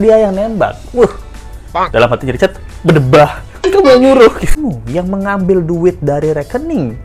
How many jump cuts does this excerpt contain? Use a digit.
1